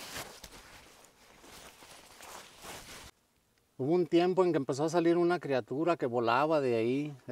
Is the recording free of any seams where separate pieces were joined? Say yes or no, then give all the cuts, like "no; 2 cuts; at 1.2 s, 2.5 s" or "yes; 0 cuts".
no; 1 cut; at 3.1 s